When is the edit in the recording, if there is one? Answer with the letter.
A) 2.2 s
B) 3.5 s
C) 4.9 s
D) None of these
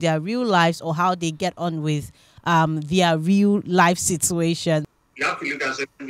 C